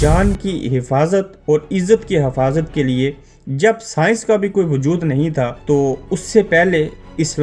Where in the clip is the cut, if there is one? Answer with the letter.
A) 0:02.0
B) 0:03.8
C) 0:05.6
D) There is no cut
C